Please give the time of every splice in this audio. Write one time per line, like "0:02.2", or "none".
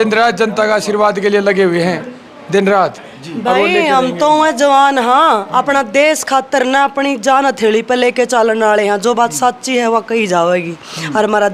none

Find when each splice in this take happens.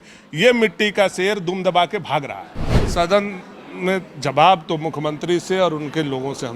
0:02.8

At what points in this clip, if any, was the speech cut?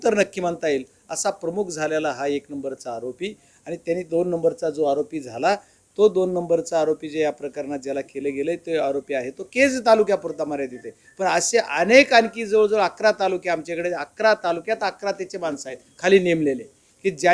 none

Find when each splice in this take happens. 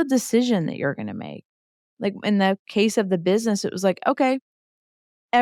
none

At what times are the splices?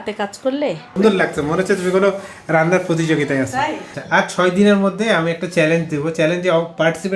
0:01.0
0:03.9

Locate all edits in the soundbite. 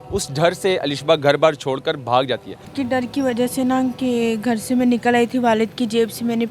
0:02.7

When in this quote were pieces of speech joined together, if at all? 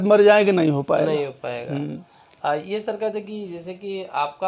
none

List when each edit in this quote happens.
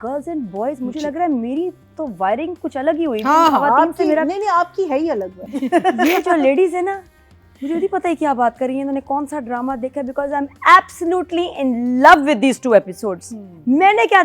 0:05.4

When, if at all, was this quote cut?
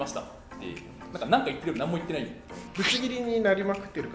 0:02.7

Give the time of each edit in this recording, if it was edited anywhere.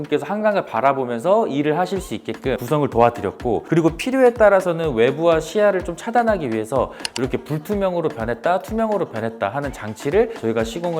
none

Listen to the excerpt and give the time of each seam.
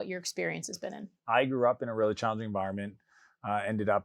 0:01.1

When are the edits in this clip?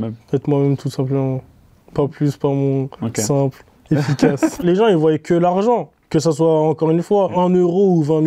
0:04.6
0:07.3

